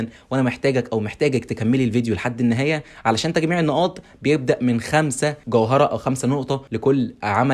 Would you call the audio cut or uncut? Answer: cut